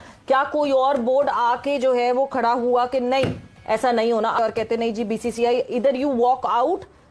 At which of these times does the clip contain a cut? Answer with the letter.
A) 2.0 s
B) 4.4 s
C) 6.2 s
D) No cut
B